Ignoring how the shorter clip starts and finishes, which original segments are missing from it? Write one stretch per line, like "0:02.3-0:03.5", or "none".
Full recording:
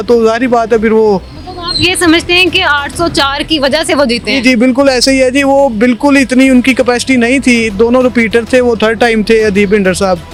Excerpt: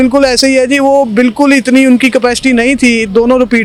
none